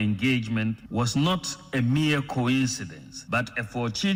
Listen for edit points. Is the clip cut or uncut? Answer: uncut